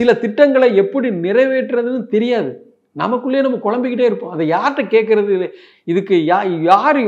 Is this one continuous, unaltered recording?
yes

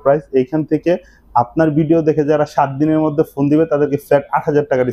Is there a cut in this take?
no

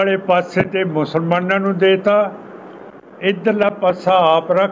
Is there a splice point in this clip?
no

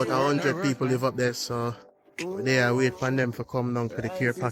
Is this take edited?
no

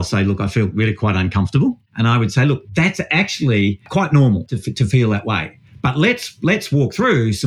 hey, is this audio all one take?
no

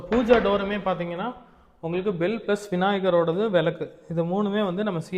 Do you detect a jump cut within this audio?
no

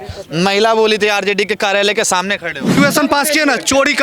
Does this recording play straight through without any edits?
no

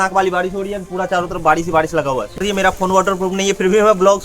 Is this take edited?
yes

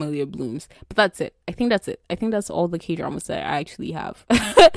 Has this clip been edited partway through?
no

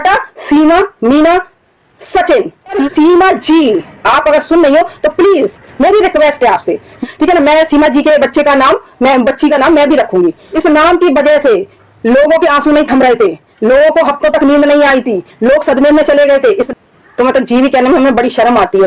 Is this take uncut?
no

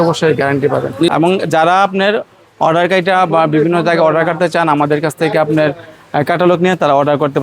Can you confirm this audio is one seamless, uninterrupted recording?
no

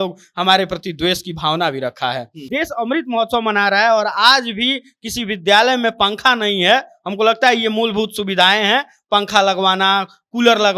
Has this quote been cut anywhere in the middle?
yes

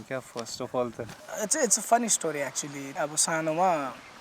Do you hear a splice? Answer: yes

